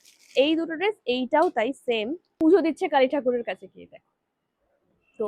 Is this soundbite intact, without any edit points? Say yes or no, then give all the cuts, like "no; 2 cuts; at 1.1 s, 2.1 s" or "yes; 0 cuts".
no; 1 cut; at 2.2 s